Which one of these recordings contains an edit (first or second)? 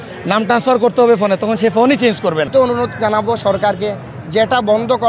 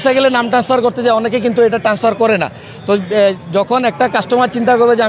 first